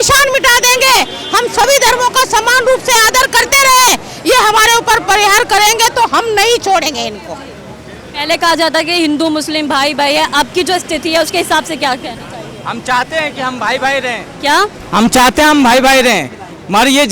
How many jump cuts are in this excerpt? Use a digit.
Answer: 0